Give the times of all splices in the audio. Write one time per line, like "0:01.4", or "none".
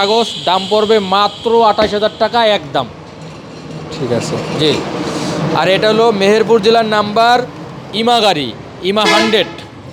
none

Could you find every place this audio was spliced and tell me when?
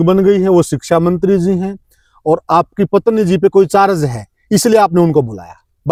none

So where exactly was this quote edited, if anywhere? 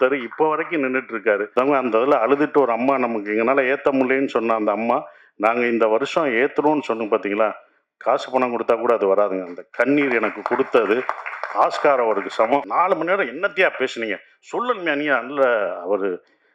0:01.5
0:12.7

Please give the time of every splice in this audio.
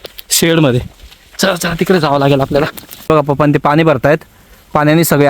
0:03.1

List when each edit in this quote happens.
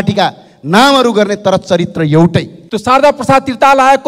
0:02.6

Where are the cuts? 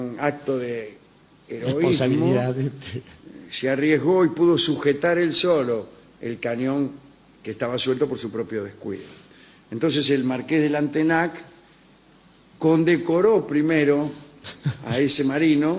none

